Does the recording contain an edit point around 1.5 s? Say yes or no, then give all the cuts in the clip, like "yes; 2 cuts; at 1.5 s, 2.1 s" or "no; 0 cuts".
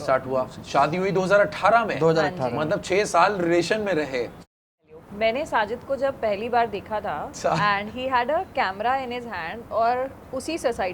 no; 2 cuts; at 4.8 s, 7.3 s